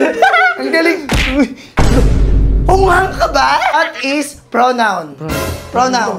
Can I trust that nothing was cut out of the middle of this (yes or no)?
no